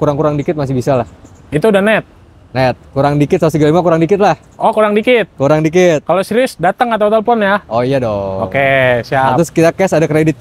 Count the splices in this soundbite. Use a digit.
0